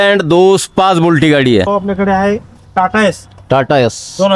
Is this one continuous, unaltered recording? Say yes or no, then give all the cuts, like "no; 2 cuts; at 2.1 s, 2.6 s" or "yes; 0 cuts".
no; 1 cut; at 1.7 s